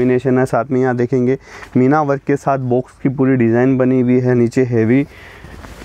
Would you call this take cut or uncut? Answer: uncut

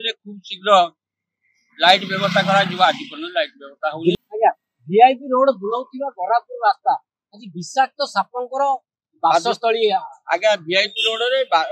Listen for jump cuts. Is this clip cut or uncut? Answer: cut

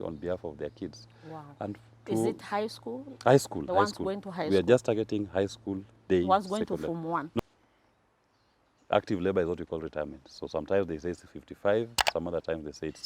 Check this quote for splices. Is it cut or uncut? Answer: cut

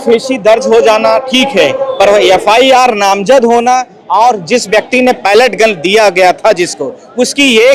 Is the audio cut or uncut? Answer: uncut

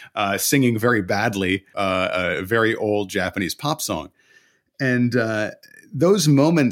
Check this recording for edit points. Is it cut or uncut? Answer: cut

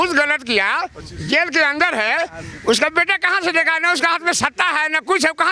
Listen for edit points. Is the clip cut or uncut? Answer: uncut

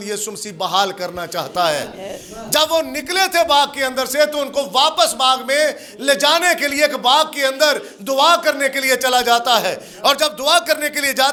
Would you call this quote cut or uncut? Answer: uncut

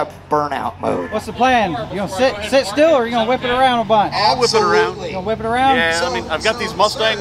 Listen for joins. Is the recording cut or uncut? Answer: cut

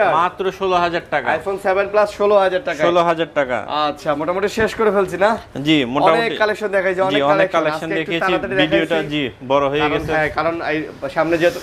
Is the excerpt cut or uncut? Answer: uncut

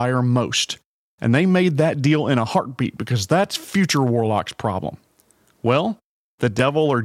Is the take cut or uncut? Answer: uncut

